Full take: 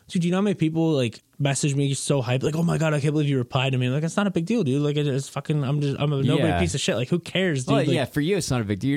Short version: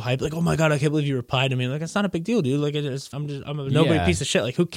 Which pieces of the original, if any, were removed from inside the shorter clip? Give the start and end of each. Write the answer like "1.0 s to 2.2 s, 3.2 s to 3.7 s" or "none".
5.4 s to 5.7 s